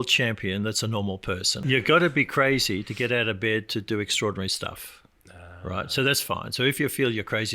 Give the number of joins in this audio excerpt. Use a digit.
1